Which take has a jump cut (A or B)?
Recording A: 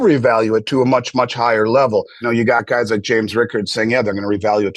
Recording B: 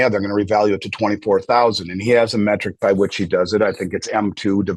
A